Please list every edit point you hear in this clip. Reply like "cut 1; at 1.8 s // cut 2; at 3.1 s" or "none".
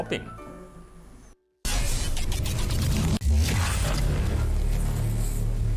cut 1; at 4.9 s